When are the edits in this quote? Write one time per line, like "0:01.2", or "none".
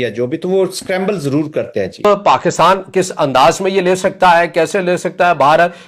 0:02.0